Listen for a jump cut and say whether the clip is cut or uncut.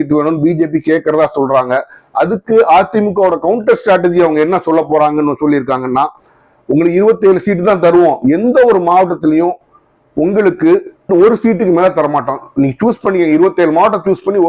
uncut